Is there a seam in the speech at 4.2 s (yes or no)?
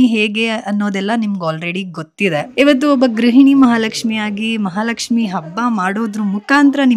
no